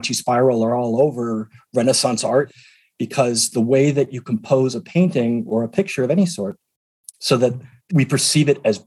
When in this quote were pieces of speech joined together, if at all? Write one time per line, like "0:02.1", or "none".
0:02.5
0:07.7